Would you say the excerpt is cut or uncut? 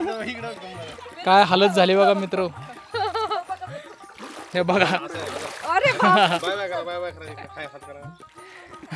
uncut